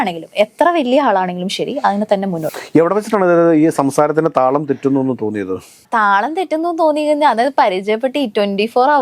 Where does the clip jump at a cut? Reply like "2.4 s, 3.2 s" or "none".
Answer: 2.5 s